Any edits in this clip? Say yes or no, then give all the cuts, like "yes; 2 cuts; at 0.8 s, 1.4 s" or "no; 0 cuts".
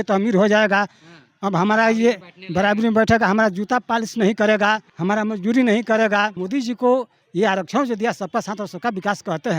yes; 2 cuts; at 4.9 s, 6.4 s